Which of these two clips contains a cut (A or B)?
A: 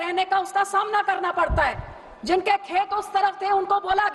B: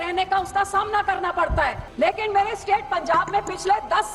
B